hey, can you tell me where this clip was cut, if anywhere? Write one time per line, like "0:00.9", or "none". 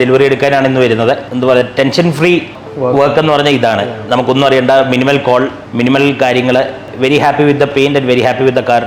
0:01.3
0:06.9

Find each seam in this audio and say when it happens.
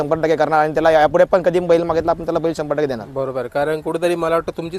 none

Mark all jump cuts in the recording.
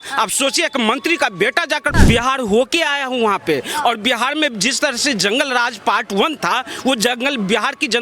0:01.9

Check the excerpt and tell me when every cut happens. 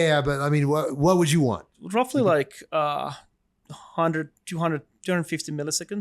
0:01.7

